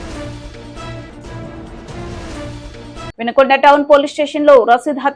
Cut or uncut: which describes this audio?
uncut